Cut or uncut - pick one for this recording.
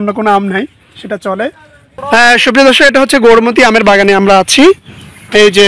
cut